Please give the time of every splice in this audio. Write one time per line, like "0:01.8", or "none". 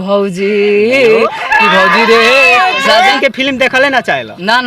0:03.2